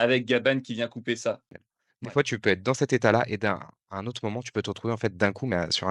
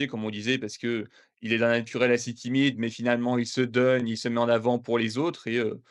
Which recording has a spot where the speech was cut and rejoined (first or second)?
first